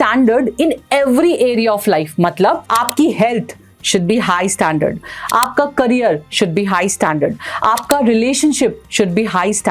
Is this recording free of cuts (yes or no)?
yes